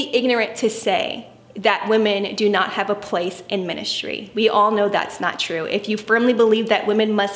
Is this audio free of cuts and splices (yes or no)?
yes